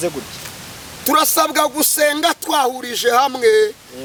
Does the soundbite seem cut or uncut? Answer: uncut